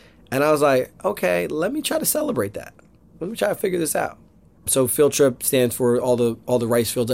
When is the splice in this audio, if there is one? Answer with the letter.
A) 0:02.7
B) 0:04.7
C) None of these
B